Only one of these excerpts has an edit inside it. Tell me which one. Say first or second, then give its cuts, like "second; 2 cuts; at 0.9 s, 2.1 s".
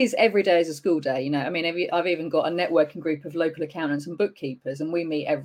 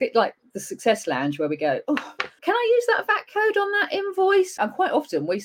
second; 2 cuts; at 2.3 s, 4.6 s